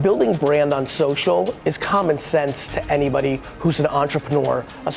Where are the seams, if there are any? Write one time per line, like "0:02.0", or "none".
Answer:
none